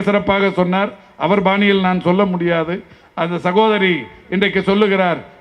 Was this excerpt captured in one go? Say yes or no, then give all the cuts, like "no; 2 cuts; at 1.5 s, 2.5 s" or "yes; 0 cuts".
yes; 0 cuts